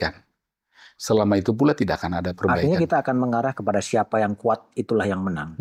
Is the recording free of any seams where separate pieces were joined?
yes; 0 cuts

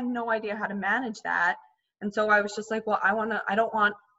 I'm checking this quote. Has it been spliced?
no; 0 cuts

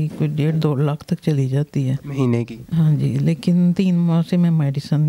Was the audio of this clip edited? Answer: no; 0 cuts

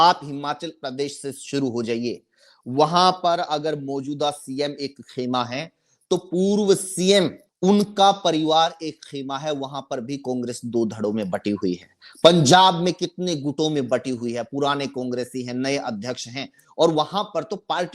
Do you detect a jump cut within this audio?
yes; 1 cut; at 7.4 s

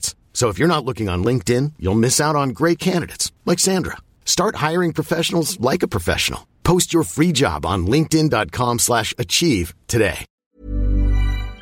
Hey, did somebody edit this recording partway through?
yes; 1 cut; at 10.3 s

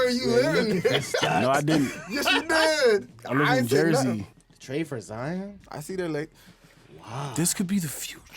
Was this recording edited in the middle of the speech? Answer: yes; 1 cut; at 4.3 s

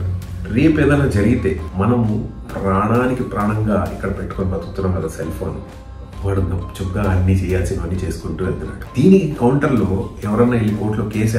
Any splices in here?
yes; 2 cuts; at 1.6 s, 8.8 s

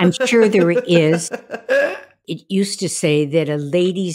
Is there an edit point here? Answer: yes; 1 cut; at 1.9 s

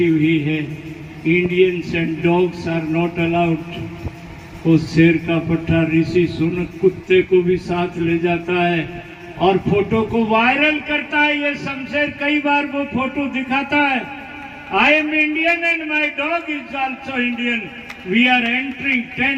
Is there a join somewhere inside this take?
no; 0 cuts

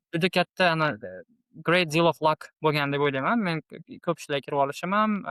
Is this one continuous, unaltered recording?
yes; 0 cuts

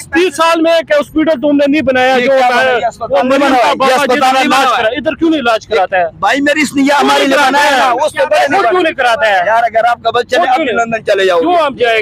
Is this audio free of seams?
yes; 0 cuts

